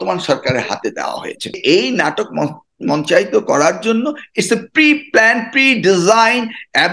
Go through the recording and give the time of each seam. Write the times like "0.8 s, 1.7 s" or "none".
1.6 s